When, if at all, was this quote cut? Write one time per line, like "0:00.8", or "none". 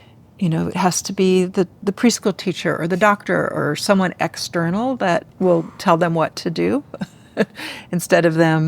0:05.3